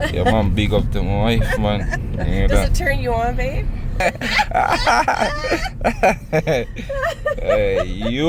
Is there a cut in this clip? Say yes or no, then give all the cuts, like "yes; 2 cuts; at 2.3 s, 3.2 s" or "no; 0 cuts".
yes; 1 cut; at 4.0 s